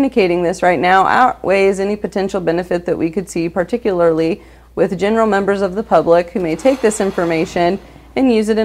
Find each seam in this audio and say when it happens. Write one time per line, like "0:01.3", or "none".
none